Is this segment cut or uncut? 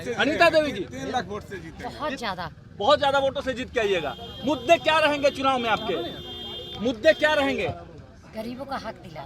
uncut